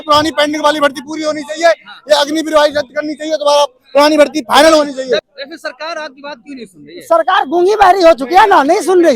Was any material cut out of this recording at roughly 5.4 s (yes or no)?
yes